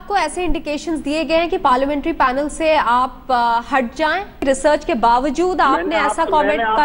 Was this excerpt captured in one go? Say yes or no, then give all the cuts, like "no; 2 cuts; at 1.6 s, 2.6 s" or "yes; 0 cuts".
no; 1 cut; at 4.4 s